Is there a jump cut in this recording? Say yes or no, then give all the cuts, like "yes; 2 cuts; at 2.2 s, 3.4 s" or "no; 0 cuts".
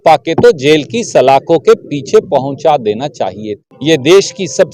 yes; 1 cut; at 3.5 s